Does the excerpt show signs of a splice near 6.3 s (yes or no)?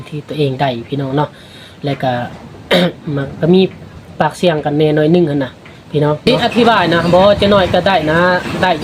yes